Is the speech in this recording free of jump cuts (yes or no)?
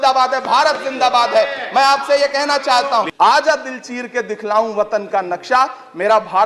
no